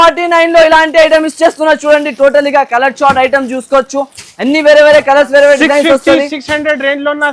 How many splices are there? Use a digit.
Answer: 0